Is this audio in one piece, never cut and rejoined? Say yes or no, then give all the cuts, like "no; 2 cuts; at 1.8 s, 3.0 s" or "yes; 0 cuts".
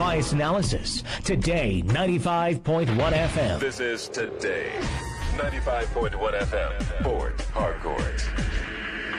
no; 1 cut; at 3.6 s